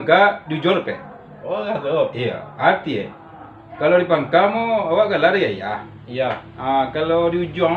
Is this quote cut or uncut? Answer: uncut